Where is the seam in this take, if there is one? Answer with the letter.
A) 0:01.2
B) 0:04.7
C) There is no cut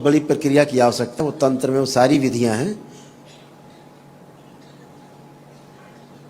A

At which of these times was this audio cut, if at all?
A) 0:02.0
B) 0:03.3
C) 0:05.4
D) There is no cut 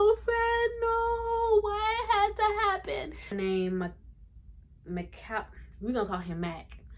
B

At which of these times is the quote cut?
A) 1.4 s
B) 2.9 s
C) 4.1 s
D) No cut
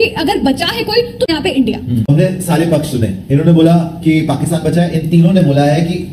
A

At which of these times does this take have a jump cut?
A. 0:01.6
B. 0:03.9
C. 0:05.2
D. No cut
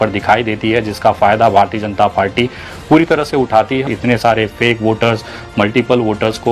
B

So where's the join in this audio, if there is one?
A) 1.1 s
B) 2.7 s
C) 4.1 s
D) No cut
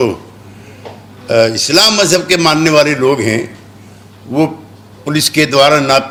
D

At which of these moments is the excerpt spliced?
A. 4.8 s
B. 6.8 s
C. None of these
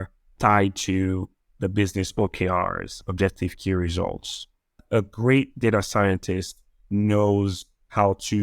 A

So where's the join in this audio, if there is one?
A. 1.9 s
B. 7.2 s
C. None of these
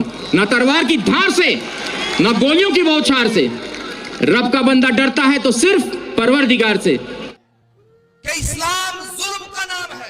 B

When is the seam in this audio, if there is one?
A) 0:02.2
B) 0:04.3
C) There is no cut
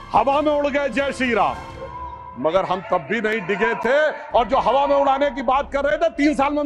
C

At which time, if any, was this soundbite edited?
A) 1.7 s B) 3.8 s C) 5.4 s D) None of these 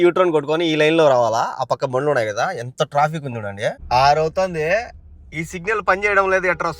B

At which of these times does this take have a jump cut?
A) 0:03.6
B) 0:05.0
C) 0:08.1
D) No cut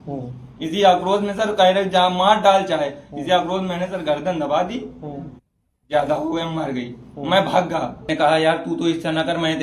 C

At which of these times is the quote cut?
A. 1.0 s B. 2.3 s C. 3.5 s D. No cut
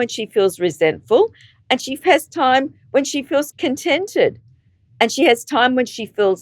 C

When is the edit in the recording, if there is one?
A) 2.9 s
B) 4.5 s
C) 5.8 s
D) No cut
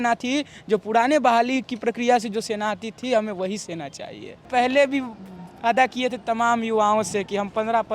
B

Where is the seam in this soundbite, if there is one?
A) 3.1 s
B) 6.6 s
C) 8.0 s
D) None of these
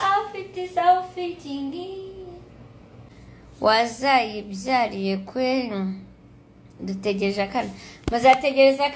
A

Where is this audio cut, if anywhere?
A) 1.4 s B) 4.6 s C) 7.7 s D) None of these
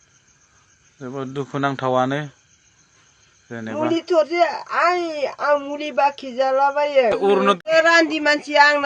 C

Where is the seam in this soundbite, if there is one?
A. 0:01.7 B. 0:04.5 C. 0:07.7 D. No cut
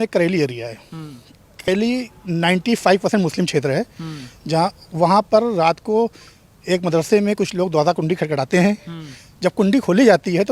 A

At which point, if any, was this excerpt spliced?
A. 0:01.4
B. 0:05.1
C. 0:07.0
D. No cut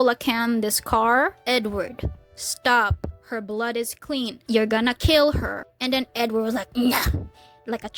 A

